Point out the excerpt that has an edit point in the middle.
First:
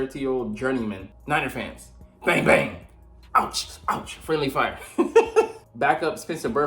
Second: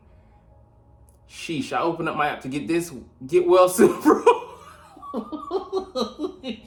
first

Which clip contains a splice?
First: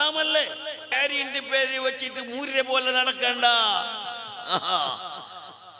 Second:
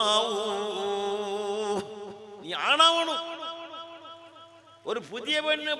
first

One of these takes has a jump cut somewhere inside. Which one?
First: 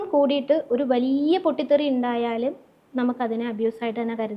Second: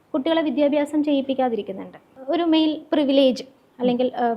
second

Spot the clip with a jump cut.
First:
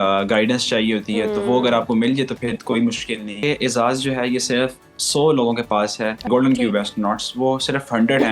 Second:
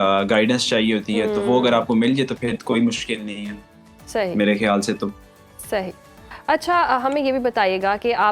first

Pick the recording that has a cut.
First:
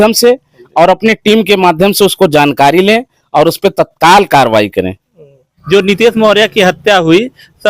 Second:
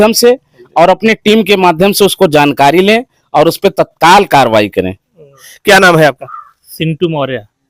first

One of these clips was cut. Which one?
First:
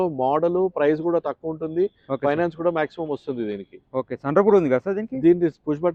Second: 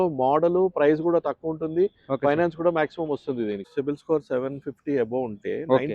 second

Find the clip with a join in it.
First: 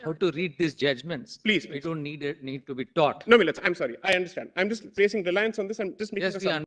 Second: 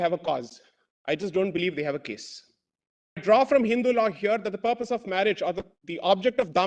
second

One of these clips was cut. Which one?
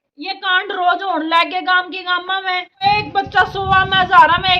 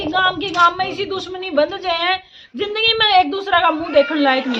first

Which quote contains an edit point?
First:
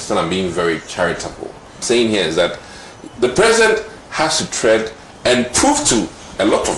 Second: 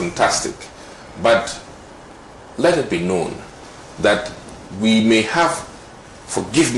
first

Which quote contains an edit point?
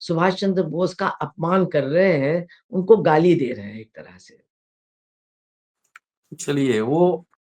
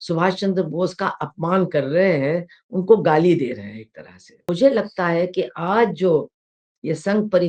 second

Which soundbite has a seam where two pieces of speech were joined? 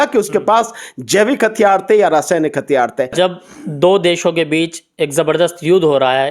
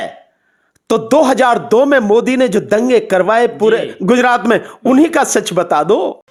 first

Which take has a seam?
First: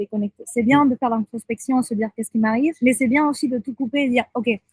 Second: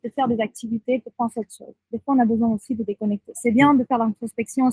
first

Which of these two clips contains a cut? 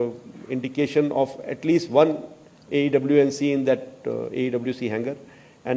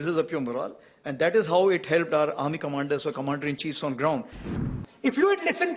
second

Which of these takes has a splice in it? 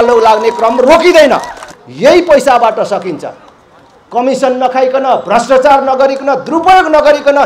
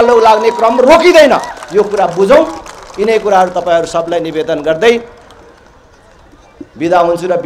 first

